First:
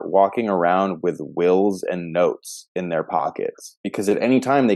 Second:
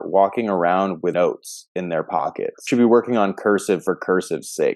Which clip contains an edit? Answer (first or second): second